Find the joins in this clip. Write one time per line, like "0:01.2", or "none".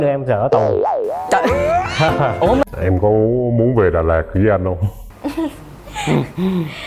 0:02.6